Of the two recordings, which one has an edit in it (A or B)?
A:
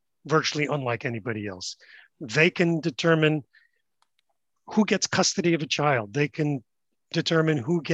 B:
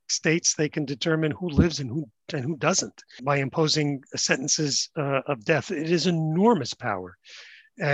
B